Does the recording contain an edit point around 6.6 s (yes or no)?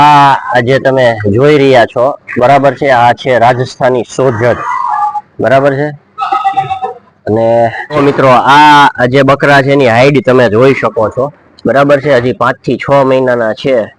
no